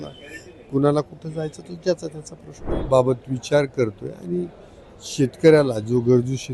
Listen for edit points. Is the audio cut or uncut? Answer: cut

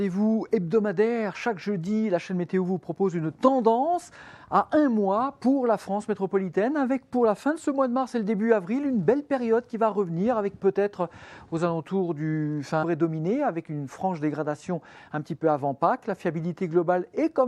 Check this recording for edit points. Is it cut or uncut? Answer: uncut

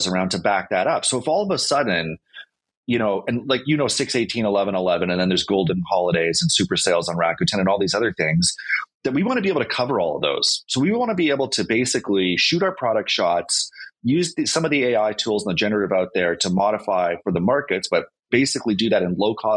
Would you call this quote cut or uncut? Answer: uncut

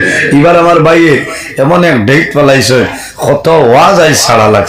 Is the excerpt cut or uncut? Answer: uncut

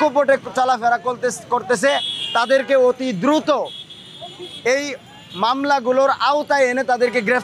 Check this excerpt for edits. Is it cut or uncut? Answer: uncut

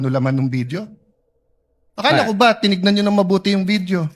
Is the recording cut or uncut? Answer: cut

